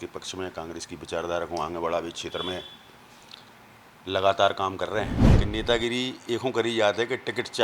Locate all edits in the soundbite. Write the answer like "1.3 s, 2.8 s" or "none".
5.3 s